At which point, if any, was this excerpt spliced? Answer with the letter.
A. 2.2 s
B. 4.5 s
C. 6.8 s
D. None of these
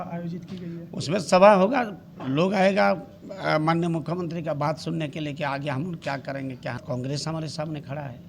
C